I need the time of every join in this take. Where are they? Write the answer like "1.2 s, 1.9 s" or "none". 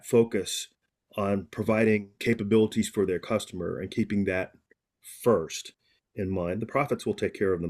2.1 s